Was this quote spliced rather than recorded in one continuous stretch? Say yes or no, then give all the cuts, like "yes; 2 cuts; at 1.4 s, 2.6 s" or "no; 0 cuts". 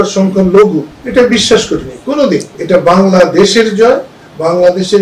yes; 2 cuts; at 1.0 s, 2.5 s